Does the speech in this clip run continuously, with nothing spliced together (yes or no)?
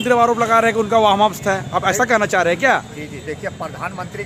yes